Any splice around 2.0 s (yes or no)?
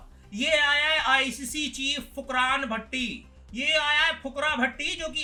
no